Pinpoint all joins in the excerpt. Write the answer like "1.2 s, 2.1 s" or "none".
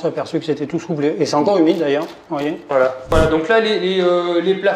3.1 s